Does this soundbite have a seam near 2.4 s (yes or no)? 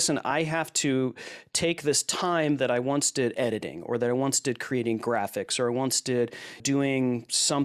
no